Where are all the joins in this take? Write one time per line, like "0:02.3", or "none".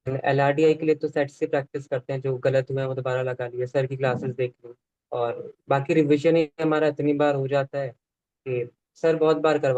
none